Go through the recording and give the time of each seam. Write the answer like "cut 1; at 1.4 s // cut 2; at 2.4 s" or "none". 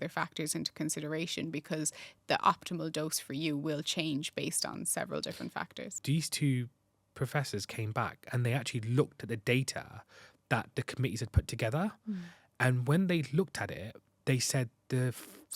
cut 1; at 6.0 s